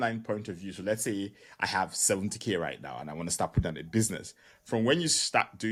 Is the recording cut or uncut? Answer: uncut